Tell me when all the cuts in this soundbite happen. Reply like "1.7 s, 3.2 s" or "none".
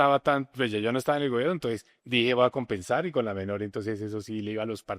1.9 s